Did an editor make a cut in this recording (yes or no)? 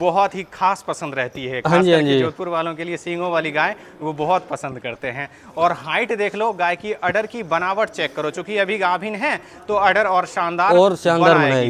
no